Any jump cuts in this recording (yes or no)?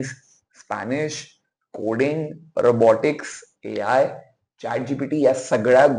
no